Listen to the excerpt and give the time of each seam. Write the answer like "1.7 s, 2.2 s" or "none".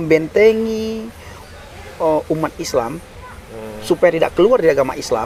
none

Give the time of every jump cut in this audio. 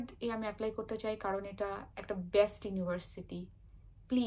none

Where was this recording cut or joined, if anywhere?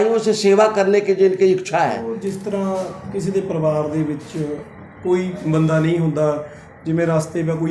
2.1 s

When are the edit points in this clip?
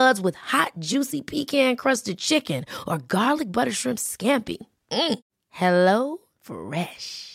none

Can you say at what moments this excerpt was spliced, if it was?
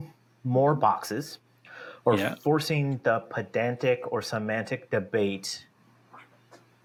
none

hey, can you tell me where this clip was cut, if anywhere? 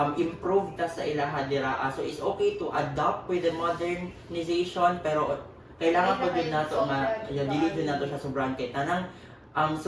none

